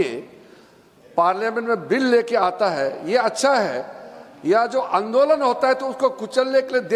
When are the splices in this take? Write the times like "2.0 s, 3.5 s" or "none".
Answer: none